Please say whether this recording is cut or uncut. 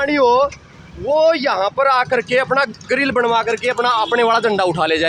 uncut